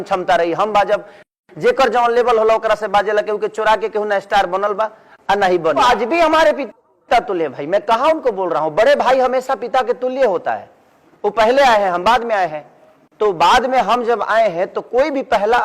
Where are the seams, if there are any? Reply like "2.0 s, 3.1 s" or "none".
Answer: 5.8 s